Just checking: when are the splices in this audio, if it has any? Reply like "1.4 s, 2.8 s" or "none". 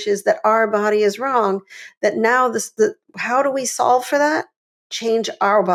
none